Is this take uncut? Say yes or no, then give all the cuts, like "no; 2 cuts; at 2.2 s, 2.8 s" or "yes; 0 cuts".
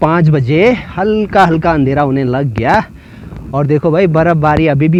yes; 0 cuts